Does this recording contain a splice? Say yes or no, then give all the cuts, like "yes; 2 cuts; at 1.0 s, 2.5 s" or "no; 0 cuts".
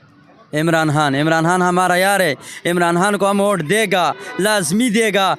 no; 0 cuts